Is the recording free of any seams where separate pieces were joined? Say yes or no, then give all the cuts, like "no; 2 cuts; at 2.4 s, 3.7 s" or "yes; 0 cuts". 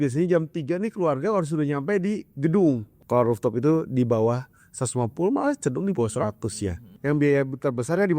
no; 2 cuts; at 2.9 s, 6.9 s